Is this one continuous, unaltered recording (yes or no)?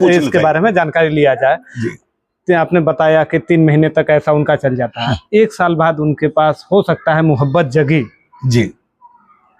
yes